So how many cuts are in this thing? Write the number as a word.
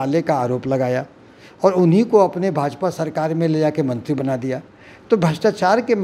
zero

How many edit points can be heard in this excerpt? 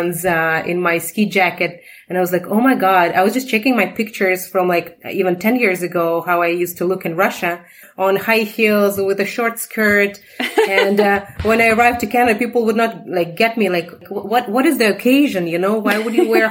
two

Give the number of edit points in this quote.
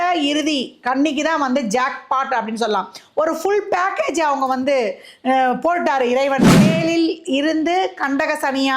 one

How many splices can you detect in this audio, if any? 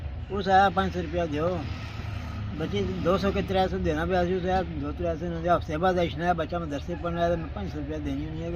zero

